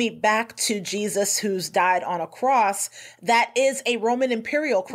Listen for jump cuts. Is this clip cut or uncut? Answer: uncut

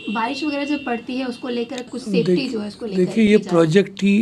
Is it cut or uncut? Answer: cut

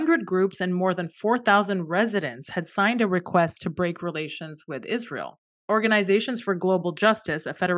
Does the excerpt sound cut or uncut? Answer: uncut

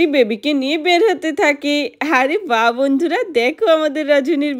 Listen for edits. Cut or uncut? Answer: uncut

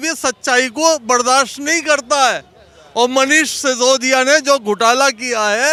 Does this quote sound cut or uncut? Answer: uncut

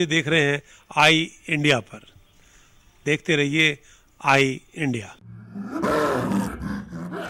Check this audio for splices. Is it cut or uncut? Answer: cut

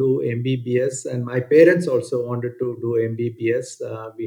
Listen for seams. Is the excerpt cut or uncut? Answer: uncut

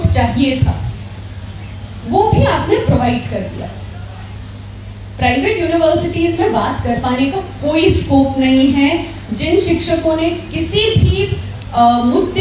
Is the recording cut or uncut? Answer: cut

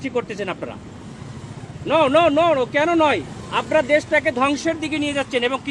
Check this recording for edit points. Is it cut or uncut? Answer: uncut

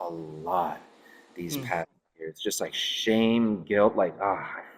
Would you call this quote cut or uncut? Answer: uncut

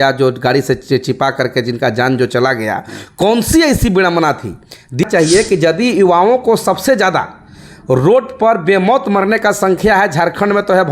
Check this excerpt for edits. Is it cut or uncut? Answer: cut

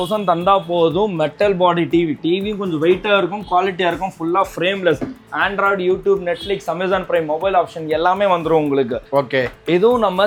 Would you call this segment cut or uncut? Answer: uncut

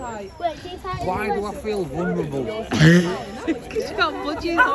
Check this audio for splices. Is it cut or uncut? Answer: uncut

